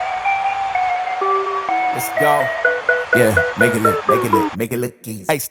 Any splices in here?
no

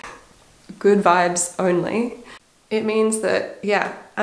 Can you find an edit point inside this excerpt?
no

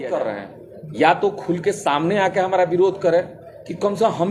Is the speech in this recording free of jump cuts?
yes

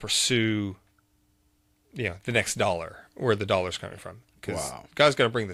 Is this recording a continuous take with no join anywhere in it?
yes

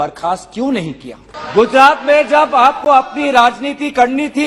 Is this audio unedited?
no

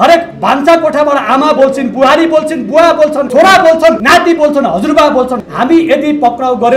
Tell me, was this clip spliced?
yes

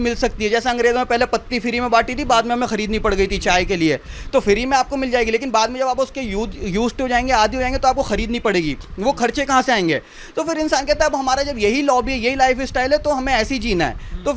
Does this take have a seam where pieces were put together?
no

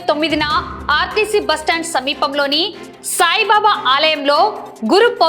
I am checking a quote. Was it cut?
no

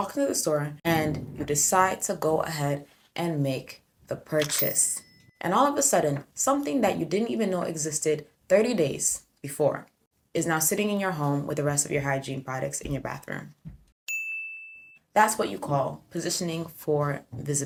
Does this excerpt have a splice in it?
no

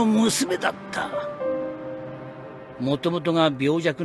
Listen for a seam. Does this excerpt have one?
yes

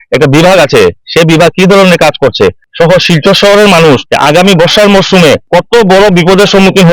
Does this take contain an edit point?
yes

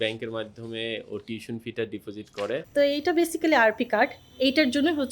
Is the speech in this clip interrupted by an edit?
yes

